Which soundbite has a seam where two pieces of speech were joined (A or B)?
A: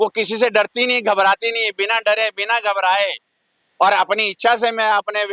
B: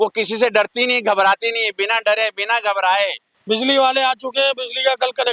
B